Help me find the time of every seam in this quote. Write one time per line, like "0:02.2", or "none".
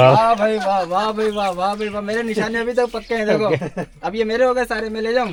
none